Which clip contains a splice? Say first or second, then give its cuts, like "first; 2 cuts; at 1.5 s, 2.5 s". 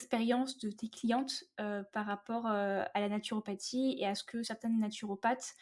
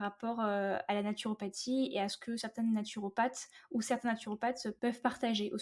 second; 1 cut; at 4.7 s